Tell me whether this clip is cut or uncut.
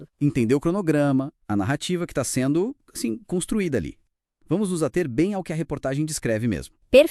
uncut